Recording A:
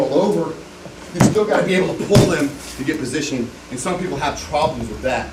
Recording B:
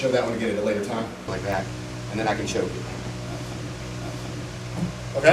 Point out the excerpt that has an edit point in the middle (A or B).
B